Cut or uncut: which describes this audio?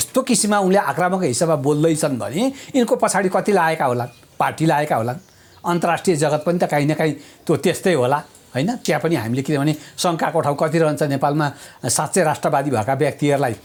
uncut